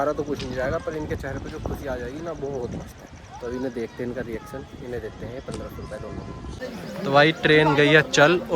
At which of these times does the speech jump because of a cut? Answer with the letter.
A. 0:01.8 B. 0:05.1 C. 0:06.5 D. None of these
C